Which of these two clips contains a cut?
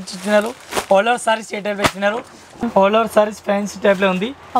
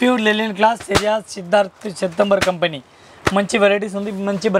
first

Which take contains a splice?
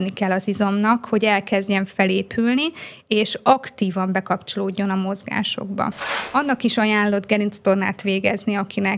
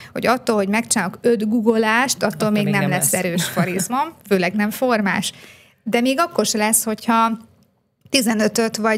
first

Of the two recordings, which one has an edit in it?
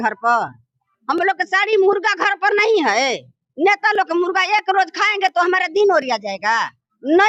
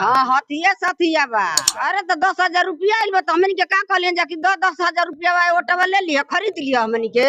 second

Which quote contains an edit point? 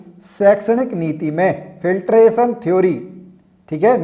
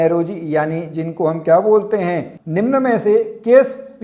second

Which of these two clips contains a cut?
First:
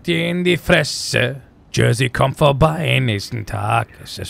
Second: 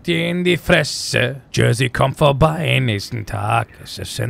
second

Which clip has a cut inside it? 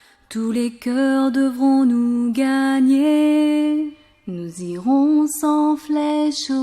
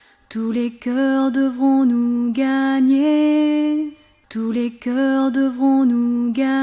first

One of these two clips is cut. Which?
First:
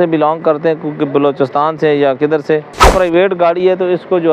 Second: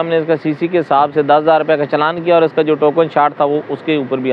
first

